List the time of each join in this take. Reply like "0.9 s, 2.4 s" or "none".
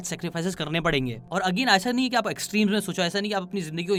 none